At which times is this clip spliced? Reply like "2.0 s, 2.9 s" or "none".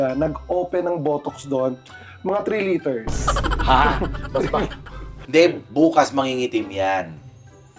5.2 s

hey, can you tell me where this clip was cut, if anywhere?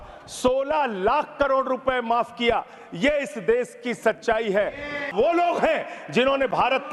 5.1 s

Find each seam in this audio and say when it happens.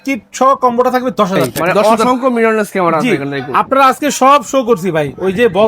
1.8 s

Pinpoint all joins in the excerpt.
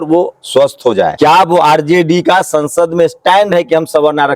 1.1 s

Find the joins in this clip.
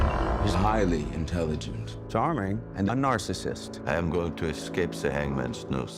none

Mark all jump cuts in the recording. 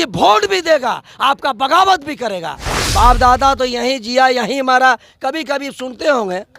2.8 s

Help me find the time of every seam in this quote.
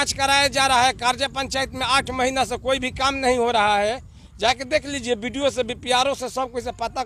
none

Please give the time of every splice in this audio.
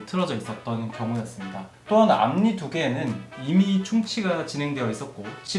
1.7 s

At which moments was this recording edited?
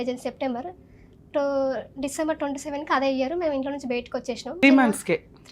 4.6 s

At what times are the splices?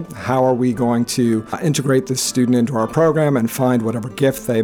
1.6 s

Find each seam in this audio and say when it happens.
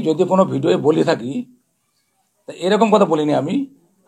none

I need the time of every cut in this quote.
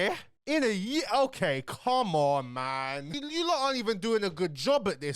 3.1 s

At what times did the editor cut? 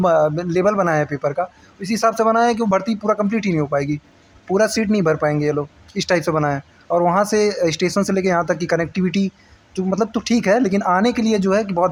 none

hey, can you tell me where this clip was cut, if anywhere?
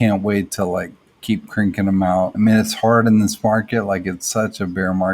2.3 s

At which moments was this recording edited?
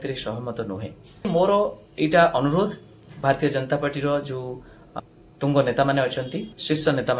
1.3 s

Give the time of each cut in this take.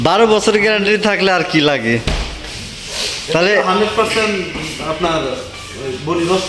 none

